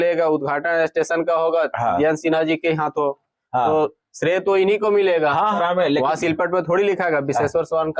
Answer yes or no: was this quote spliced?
yes